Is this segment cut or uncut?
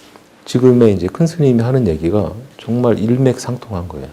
uncut